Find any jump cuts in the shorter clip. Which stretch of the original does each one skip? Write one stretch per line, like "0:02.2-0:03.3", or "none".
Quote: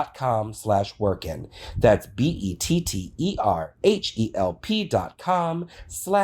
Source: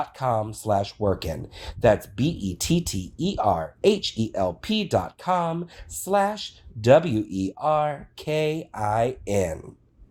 none